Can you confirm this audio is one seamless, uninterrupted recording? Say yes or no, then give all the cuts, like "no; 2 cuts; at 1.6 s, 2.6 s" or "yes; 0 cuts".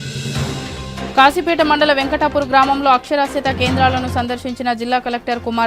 no; 1 cut; at 1.1 s